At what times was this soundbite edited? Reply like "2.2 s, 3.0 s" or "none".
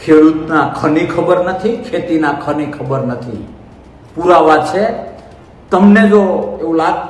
none